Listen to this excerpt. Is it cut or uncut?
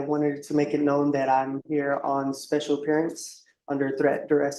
uncut